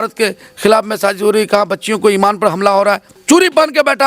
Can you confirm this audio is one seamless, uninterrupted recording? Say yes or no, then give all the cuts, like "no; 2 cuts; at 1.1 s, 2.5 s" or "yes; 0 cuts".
no; 1 cut; at 3.1 s